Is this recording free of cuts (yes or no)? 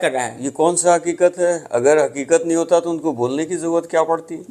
yes